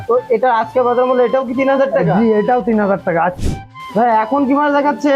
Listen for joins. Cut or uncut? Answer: cut